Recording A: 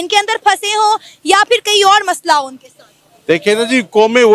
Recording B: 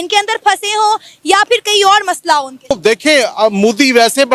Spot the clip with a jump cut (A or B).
B